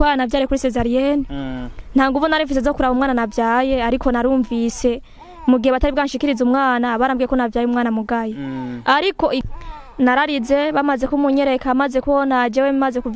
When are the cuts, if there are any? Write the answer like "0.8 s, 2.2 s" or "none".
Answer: 9.4 s